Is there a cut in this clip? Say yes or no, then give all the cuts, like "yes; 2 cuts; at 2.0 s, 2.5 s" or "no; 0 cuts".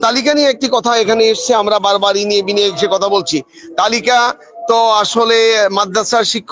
no; 0 cuts